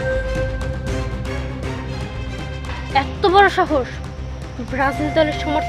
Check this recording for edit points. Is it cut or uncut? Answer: uncut